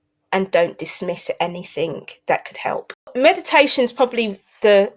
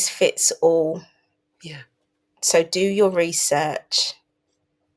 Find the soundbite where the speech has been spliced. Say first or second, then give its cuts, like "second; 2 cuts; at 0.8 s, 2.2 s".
first; 1 cut; at 3.1 s